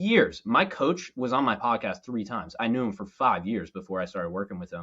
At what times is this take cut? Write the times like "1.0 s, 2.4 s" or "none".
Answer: 2.6 s

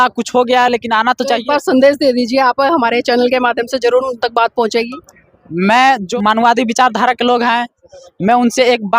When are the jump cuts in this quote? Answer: 6.1 s

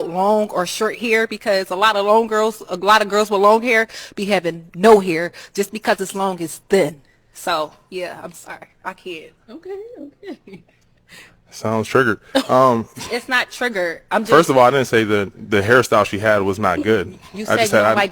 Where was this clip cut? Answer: none

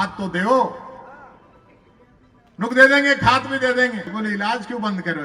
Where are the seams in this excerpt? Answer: 4.1 s

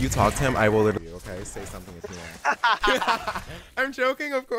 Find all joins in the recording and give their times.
none

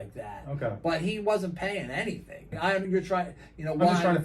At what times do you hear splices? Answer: 2.9 s

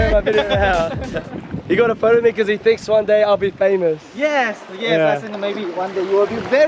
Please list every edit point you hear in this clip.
none

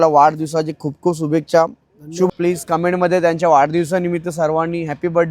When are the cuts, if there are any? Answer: 2.3 s

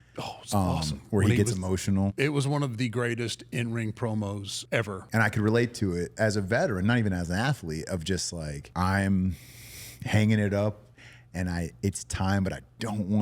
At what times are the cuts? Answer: 2.1 s, 5.0 s, 8.6 s

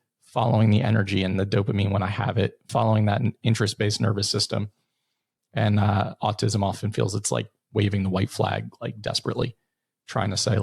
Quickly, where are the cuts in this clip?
none

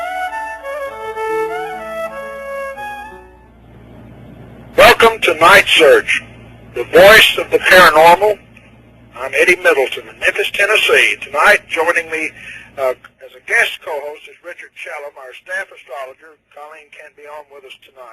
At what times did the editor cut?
1.1 s

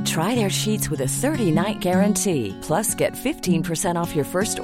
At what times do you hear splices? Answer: none

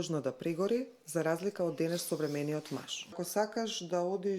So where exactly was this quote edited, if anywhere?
3.2 s

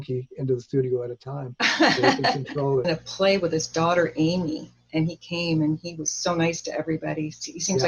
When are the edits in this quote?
2.9 s

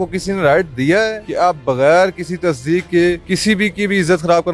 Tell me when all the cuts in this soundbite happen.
1.2 s, 3.3 s

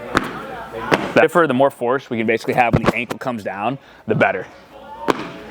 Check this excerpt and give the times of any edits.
1.2 s

